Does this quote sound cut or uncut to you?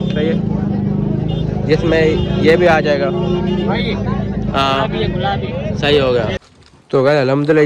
cut